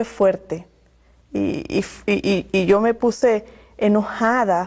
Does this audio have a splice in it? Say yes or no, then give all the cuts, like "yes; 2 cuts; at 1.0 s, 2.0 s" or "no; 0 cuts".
yes; 1 cut; at 3.6 s